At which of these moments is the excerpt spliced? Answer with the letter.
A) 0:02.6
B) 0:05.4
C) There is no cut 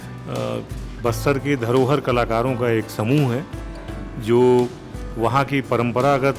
C